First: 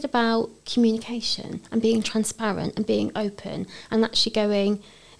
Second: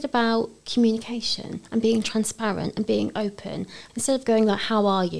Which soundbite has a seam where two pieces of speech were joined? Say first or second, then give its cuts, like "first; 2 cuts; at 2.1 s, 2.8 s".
second; 1 cut; at 3.7 s